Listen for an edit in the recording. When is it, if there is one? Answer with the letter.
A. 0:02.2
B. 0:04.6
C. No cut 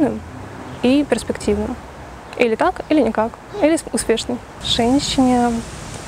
C